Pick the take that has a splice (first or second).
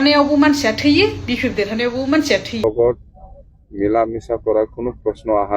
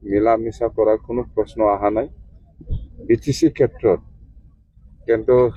first